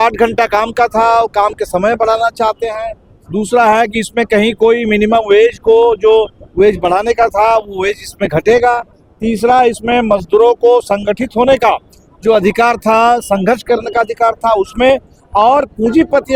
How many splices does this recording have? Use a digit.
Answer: 0